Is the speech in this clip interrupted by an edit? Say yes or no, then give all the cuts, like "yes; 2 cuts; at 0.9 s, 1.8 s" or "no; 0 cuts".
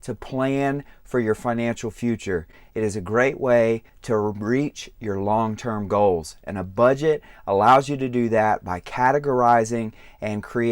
yes; 1 cut; at 3.9 s